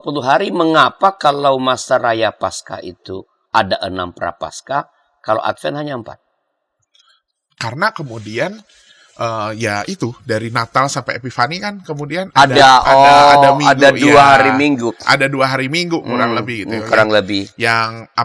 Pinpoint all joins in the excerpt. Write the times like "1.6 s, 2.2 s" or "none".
none